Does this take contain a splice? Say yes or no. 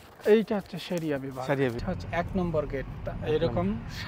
yes